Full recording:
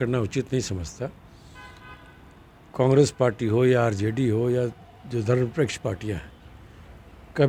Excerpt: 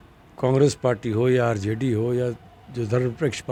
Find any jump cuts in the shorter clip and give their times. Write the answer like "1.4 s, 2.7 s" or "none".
none